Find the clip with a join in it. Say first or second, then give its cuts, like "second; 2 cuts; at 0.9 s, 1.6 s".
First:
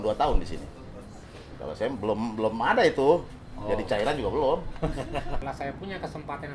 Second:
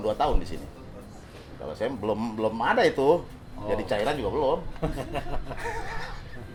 first; 1 cut; at 5.4 s